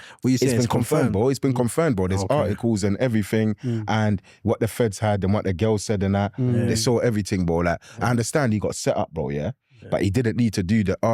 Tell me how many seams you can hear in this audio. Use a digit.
0